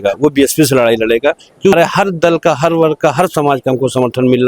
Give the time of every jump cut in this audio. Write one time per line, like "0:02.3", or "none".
0:01.7